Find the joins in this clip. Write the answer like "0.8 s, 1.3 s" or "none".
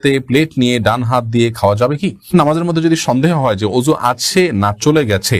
2.3 s